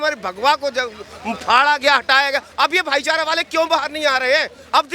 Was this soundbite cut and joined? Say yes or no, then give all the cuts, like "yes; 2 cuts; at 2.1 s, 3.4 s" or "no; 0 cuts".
no; 0 cuts